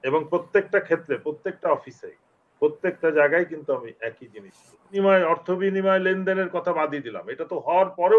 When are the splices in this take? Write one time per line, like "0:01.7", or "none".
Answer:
0:05.0